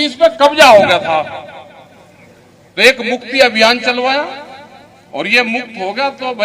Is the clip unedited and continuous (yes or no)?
yes